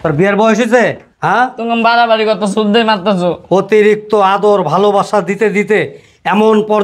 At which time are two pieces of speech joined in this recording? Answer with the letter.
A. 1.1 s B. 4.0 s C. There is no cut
A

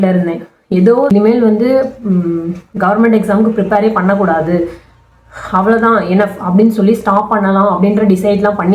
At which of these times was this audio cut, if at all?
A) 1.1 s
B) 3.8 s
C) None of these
A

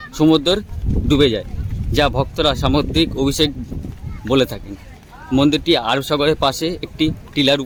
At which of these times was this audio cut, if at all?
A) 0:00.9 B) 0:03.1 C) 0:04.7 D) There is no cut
D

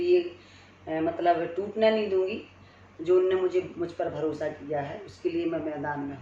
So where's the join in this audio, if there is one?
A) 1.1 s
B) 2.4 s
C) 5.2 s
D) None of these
D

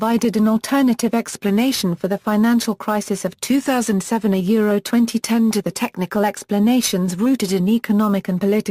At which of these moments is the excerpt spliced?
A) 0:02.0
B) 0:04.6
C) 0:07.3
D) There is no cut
D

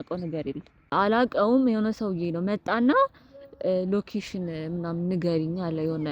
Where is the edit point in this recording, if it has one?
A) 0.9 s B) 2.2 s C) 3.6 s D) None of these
A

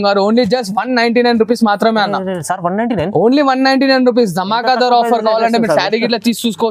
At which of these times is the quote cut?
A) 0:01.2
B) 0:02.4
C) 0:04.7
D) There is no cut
D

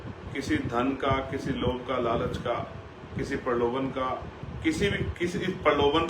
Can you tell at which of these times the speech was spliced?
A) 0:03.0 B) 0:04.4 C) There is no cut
B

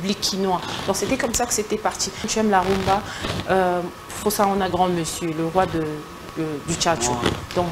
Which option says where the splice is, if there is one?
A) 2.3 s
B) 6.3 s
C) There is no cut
A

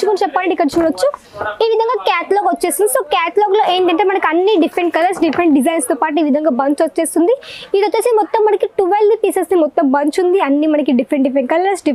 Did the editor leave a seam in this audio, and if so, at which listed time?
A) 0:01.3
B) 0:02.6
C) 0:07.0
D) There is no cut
D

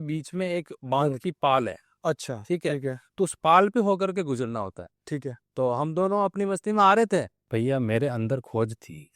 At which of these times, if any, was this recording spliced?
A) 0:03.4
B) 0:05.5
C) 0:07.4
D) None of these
C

